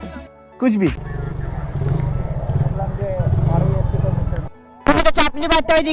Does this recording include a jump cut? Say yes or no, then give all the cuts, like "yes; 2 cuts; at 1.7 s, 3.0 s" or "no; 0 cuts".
yes; 1 cut; at 4.4 s